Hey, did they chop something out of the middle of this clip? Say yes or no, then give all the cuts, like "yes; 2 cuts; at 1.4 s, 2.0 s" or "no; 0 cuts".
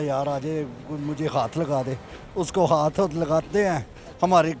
no; 0 cuts